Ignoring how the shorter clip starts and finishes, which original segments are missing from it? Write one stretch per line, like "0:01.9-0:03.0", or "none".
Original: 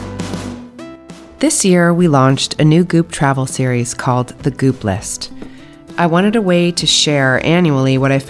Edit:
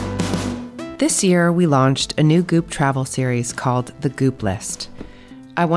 0:00.9-0:01.3

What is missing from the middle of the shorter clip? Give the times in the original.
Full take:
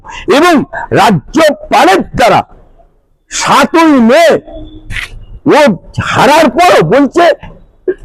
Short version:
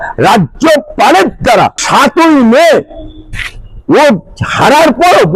0:02.5-0:03.4

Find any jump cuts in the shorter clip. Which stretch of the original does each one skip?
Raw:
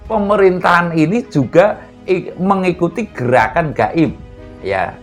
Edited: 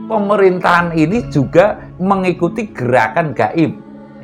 0:01.9-0:02.3

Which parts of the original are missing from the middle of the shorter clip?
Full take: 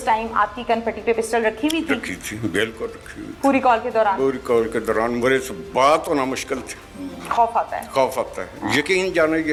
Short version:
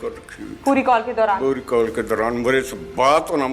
none

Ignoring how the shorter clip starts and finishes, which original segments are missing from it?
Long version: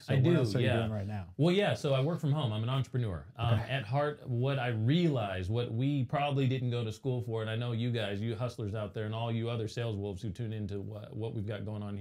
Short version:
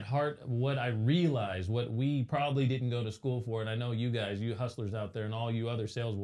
none

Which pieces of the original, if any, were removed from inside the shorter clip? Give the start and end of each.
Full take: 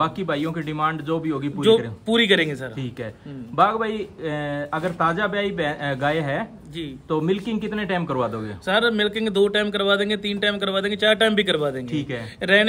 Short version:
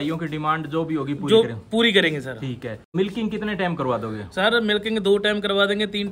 0:03.3-0:07.2

